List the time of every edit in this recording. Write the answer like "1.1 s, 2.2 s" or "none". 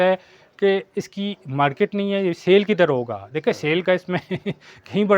none